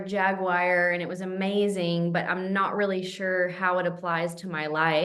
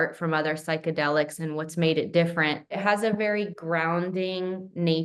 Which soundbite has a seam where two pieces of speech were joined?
second; 1 cut; at 2.8 s

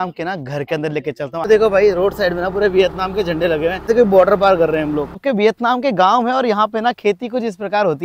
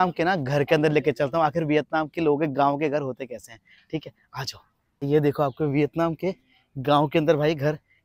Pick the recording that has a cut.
first; 3 cuts; at 1.4 s, 3.9 s, 5.2 s

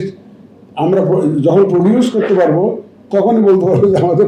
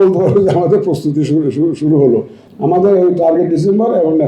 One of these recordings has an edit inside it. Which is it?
second; 1 cut; at 2.4 s

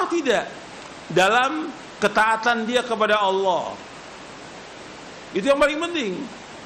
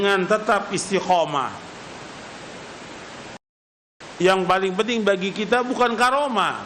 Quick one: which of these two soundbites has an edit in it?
second; 1 cut; at 3.5 s

